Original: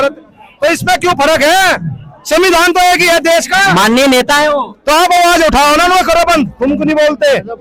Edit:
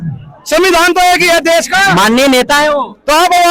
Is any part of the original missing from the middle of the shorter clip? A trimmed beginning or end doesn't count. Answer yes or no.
no